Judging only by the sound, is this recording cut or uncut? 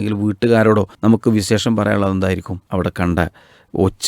cut